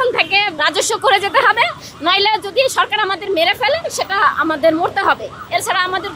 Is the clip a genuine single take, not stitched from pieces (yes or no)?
yes